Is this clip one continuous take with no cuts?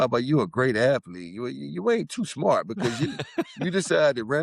yes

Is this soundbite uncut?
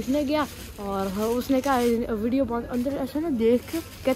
yes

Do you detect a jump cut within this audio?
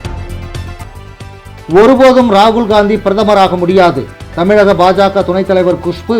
yes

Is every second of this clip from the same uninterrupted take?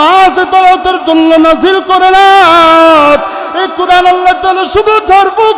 yes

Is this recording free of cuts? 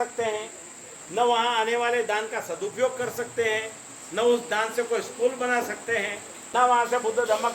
no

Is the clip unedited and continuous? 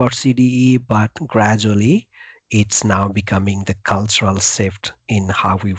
yes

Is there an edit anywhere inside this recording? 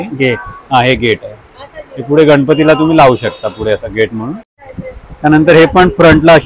yes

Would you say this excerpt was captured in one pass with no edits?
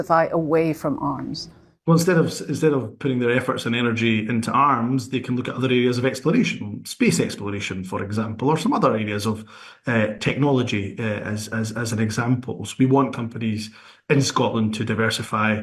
yes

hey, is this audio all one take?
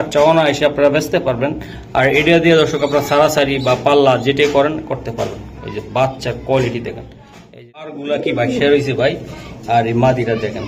no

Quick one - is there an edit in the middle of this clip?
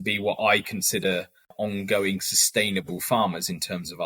yes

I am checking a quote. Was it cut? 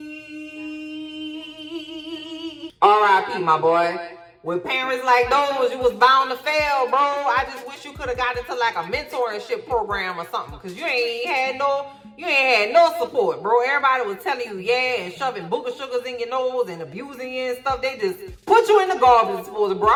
no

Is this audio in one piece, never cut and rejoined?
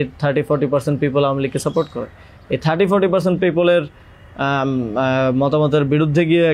yes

